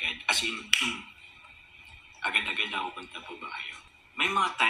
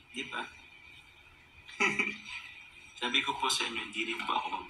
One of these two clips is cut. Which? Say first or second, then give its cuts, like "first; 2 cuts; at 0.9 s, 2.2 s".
first; 1 cut; at 3.8 s